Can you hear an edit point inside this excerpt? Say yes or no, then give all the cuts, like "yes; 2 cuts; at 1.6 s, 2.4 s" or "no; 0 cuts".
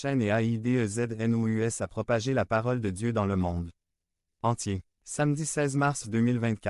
no; 0 cuts